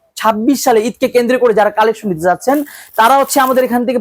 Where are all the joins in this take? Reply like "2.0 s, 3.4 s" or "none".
none